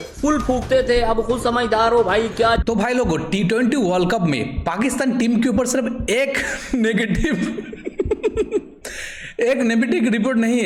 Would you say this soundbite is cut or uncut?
uncut